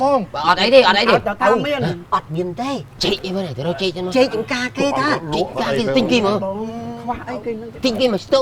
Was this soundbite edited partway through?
no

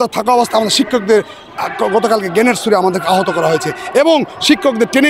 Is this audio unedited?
yes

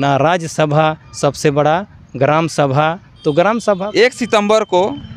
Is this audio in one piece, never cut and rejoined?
no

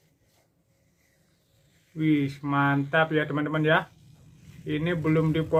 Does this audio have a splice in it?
no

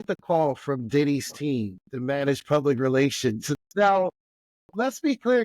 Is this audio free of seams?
no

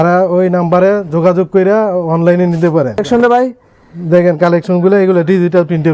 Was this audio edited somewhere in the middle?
yes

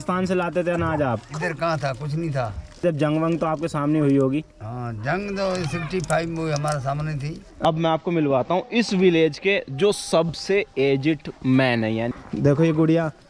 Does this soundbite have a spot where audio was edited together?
yes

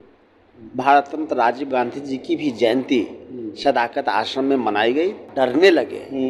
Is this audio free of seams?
no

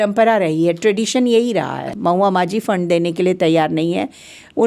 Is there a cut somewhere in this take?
yes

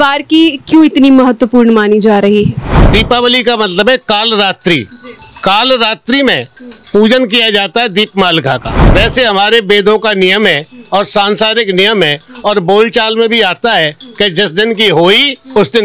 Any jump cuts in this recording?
yes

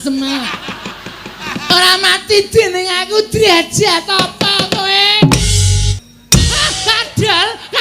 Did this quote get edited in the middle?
yes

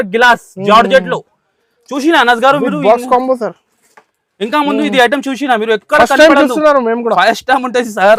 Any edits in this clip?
no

